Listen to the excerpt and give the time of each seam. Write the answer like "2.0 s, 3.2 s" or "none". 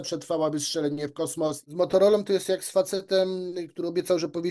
1.6 s